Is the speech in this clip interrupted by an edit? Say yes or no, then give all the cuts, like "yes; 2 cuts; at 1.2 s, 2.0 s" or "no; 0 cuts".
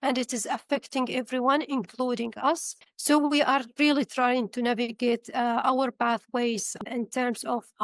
yes; 2 cuts; at 2.8 s, 6.8 s